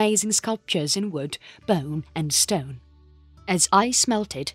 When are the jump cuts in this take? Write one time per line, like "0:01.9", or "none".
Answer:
none